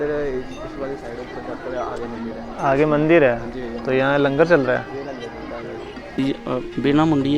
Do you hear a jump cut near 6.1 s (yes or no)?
yes